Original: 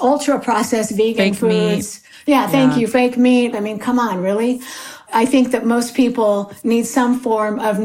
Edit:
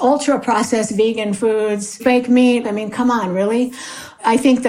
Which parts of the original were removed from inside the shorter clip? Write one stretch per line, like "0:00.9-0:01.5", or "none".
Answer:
0:02.0-0:02.9